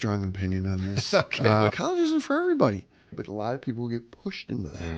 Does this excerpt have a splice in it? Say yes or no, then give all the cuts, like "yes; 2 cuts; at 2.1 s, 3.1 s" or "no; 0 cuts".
yes; 2 cuts; at 1.7 s, 3.1 s